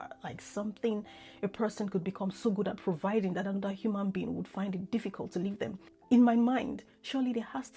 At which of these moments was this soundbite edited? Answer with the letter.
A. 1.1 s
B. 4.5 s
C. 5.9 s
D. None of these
C